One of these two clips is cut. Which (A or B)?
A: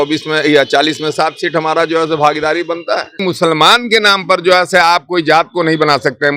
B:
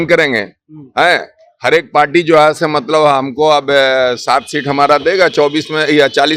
A